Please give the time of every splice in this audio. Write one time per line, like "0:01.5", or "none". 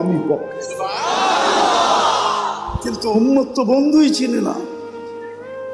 0:04.8